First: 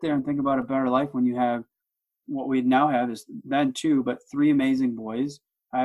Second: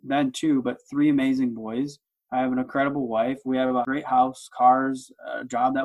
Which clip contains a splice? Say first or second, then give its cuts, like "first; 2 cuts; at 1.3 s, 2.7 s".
second; 1 cut; at 3.9 s